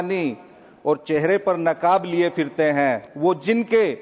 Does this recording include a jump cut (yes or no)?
yes